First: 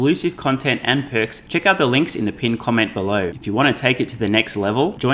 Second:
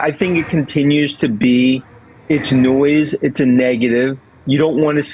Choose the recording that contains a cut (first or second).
first